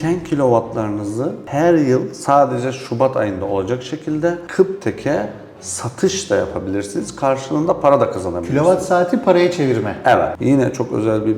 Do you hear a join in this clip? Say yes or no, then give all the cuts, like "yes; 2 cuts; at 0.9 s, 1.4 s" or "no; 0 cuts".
yes; 1 cut; at 10.3 s